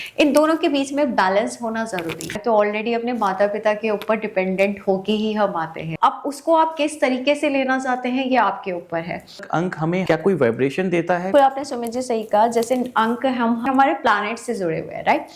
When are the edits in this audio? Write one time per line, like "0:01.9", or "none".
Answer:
0:02.3
0:05.9
0:09.6
0:11.3
0:13.7